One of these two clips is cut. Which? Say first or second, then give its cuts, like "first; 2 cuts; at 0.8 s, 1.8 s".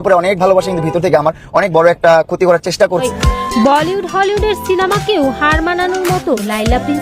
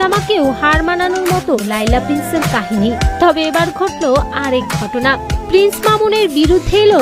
first; 1 cut; at 3.0 s